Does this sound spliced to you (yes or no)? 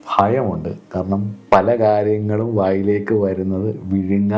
yes